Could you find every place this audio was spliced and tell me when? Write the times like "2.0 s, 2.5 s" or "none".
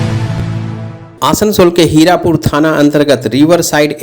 1.0 s